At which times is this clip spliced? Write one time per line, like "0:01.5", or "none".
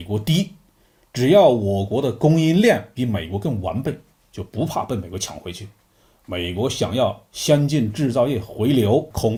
none